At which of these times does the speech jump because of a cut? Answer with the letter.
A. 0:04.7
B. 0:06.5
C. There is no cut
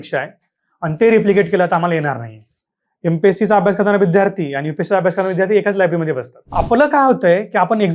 B